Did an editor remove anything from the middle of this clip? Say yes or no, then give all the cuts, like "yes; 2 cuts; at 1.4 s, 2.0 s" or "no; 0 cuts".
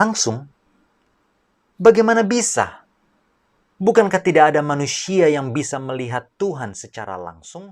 no; 0 cuts